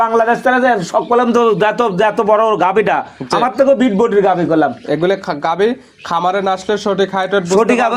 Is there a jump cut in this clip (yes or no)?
no